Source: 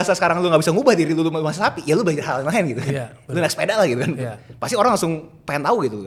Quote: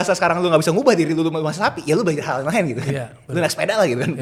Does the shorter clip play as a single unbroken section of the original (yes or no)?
yes